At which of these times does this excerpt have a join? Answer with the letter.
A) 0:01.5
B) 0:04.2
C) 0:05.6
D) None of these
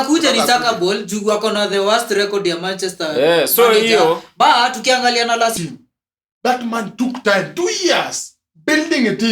C